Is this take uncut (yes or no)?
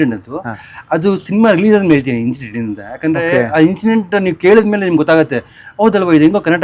yes